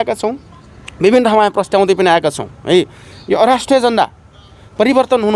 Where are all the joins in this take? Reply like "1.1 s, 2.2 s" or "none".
none